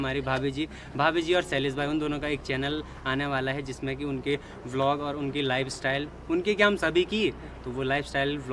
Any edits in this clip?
no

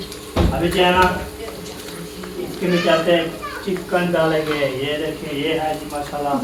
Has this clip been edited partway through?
no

